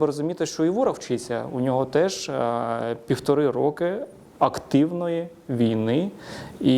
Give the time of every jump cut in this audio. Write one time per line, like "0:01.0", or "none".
none